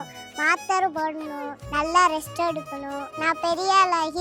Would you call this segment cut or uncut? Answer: cut